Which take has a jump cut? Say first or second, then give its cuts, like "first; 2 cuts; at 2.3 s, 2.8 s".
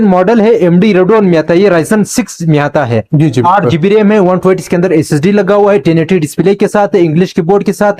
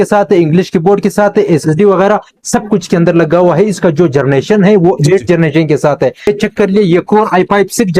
second; 1 cut; at 6.3 s